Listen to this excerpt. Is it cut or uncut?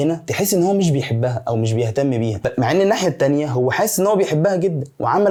uncut